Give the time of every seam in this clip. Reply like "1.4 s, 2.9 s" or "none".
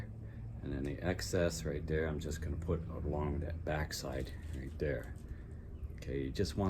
none